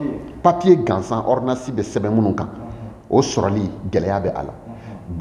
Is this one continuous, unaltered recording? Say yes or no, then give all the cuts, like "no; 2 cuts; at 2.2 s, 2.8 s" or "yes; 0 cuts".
yes; 0 cuts